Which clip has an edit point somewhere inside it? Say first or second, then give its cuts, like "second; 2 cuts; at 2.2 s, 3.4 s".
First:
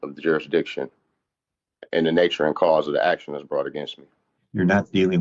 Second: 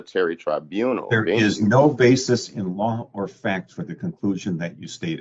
first; 1 cut; at 4.0 s